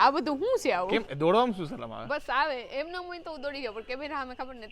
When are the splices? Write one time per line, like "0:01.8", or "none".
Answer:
0:00.9